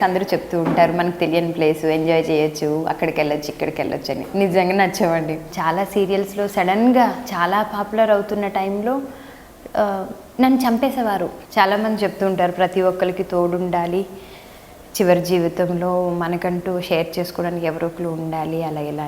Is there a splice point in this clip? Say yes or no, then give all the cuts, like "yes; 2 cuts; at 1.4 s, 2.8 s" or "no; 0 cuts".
yes; 2 cuts; at 5.5 s, 11.4 s